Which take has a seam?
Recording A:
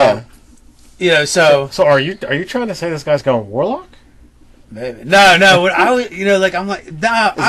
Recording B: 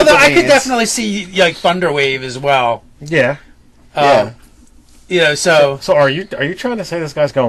B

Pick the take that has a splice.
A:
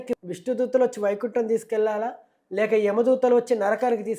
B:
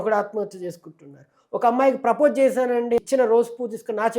B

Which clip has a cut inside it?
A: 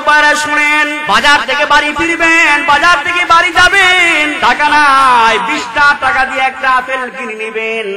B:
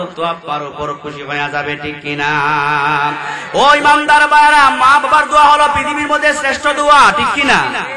A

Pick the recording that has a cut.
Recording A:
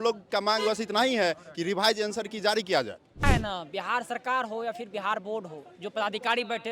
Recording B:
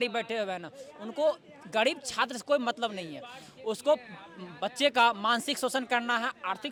A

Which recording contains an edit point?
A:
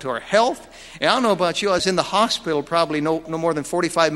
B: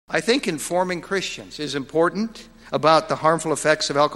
A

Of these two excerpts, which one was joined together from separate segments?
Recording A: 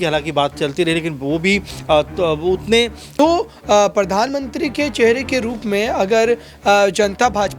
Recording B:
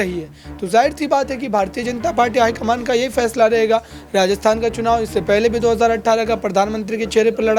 A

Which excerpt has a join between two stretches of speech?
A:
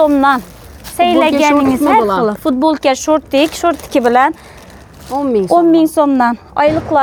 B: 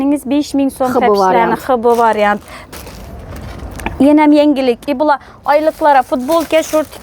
B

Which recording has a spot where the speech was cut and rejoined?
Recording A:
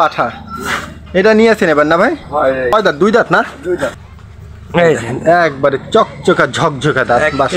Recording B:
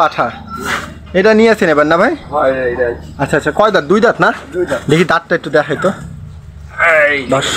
A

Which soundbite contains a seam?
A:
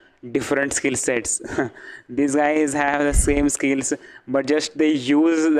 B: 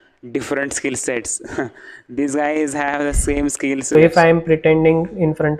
B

